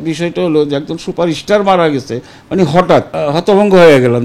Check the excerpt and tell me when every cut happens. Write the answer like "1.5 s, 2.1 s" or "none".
3.1 s